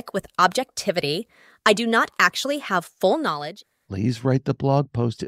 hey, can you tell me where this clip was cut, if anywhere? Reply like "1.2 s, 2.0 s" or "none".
3.6 s